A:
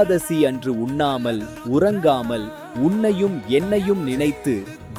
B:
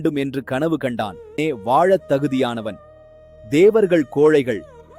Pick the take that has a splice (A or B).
B